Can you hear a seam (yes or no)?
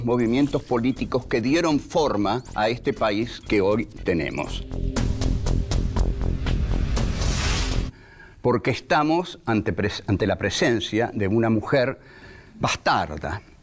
no